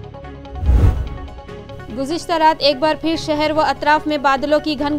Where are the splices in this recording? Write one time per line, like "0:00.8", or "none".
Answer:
0:01.4